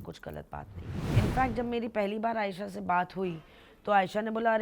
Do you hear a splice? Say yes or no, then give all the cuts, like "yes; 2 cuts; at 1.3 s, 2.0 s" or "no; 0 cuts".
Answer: yes; 1 cut; at 1.0 s